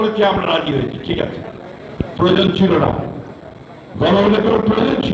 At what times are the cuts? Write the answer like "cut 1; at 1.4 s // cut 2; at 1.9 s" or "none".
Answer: none

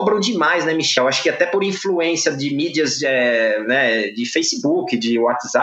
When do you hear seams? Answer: cut 1; at 0.9 s

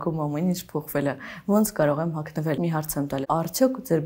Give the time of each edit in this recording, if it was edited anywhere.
cut 1; at 3.1 s

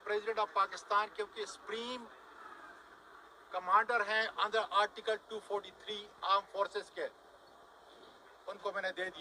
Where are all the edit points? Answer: none

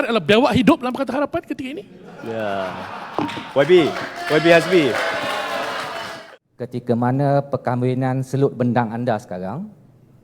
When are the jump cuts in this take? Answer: cut 1; at 6.1 s

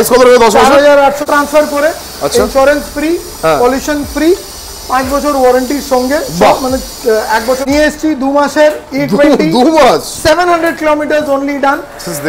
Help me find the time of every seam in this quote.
cut 1; at 1.2 s // cut 2; at 7.6 s

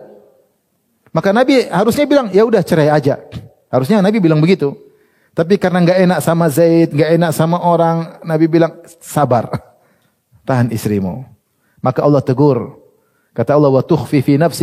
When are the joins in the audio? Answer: none

